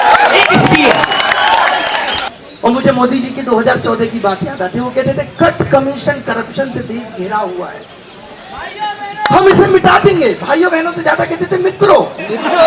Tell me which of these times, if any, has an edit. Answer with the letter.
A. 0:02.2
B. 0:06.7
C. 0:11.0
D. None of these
A